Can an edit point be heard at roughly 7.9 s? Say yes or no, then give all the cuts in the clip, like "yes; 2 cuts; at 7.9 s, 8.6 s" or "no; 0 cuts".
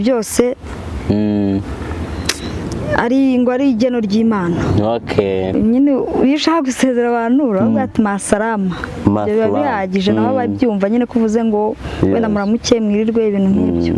no; 1 cut; at 5.5 s